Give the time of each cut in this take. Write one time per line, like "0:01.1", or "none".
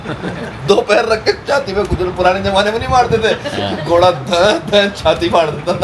none